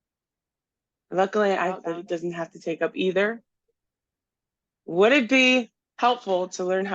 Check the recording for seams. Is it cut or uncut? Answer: cut